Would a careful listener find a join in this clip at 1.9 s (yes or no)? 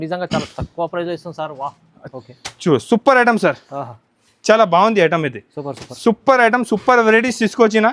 yes